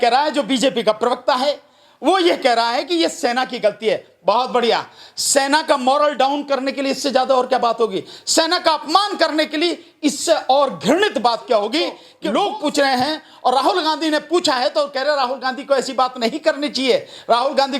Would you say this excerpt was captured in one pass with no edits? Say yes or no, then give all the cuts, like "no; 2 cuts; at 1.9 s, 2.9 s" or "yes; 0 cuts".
no; 1 cut; at 12.1 s